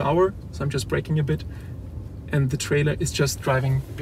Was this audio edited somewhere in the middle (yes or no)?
no